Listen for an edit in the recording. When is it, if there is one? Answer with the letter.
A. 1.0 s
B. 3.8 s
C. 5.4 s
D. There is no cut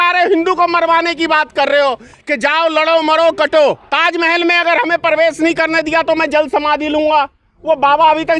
B